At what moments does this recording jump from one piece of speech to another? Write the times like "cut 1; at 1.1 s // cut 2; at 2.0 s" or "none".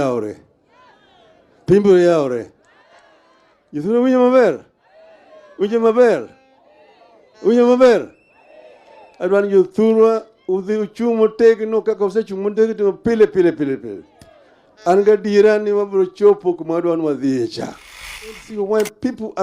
cut 1; at 18.4 s